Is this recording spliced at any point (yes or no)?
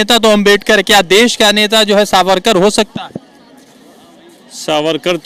no